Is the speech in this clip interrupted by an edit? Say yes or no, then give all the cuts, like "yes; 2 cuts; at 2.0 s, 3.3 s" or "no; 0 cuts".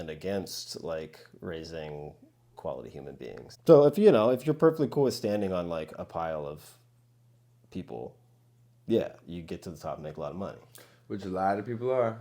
yes; 1 cut; at 3.5 s